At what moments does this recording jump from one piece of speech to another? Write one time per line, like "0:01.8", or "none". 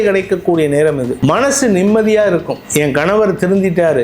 0:01.1
0:02.6